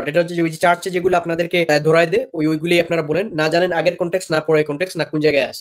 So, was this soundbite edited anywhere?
no; 0 cuts

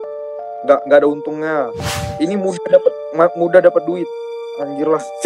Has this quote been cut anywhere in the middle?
yes; 1 cut; at 2.0 s

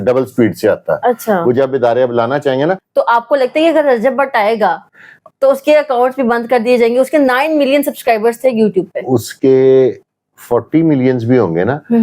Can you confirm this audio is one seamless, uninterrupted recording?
no; 1 cut; at 2.8 s

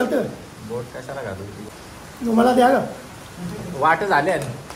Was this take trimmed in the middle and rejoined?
yes; 1 cut; at 1.7 s

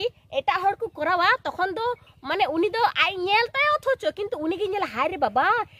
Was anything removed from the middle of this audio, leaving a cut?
no; 0 cuts

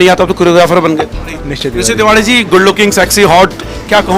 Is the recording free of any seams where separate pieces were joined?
no; 1 cut; at 1.2 s

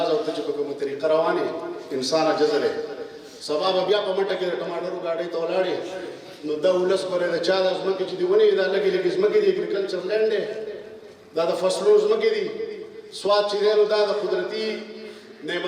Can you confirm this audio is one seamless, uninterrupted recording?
yes; 0 cuts

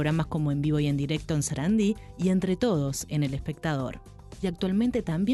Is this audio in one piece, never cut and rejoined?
yes; 0 cuts

